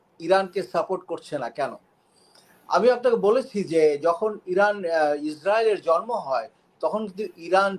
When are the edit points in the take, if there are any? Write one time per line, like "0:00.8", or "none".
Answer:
none